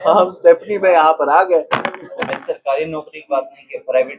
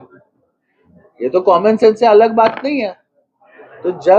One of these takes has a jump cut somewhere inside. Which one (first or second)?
first